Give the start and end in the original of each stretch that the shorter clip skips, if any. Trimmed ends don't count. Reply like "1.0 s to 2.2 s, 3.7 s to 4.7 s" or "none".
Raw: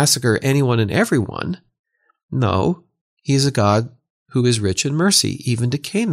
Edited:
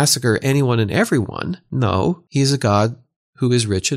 1.6 s to 2.2 s, 2.8 s to 3.2 s